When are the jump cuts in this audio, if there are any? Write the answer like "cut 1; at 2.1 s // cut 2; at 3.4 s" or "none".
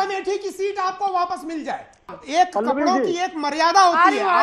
cut 1; at 2.1 s

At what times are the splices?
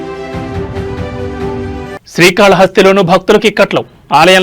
cut 1; at 1.7 s

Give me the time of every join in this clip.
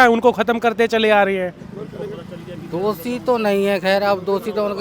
cut 1; at 1.6 s

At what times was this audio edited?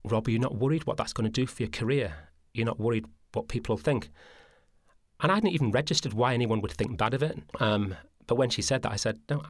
cut 1; at 7.4 s

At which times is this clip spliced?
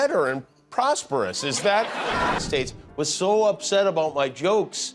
cut 1; at 2.4 s

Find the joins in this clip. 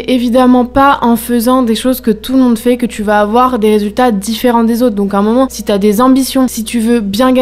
none

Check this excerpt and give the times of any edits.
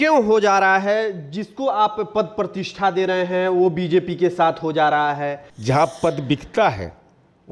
cut 1; at 5.5 s

